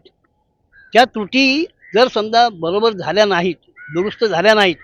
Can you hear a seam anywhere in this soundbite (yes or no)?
no